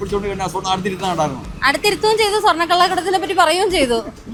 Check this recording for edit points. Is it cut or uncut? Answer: uncut